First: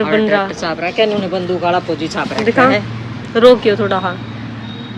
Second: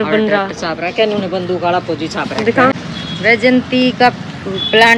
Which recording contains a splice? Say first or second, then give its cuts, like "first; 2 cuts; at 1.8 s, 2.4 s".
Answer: second; 1 cut; at 2.7 s